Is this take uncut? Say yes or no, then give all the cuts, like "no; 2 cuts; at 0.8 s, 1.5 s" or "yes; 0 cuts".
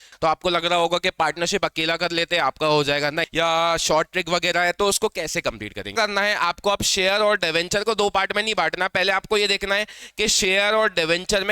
no; 2 cuts; at 3.2 s, 5.9 s